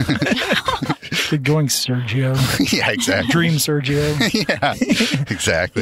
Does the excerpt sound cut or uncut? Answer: uncut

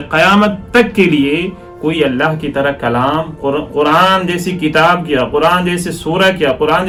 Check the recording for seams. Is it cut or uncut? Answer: uncut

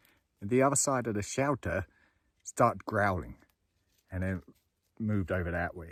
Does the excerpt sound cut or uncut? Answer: uncut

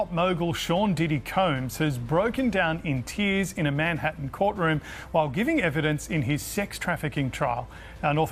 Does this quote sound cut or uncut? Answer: uncut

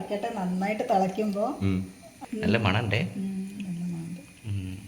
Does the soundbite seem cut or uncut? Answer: cut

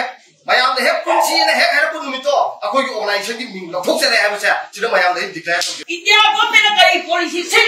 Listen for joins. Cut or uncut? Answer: cut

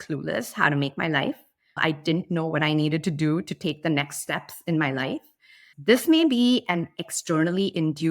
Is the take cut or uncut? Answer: cut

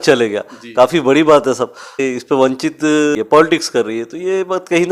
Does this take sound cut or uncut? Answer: cut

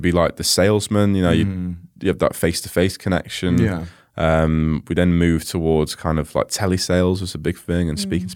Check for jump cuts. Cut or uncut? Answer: uncut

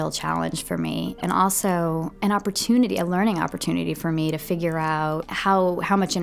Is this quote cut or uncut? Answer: cut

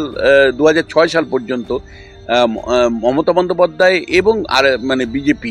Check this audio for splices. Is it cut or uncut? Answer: uncut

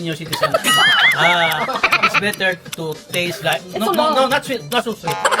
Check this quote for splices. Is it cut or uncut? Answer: uncut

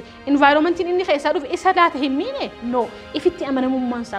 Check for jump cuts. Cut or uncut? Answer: uncut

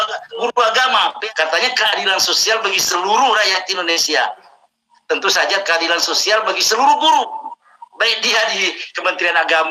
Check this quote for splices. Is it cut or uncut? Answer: cut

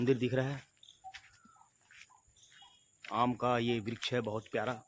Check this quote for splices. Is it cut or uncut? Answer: uncut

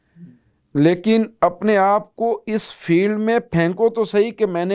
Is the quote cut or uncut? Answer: uncut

